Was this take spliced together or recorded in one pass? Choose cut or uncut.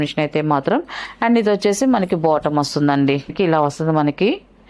cut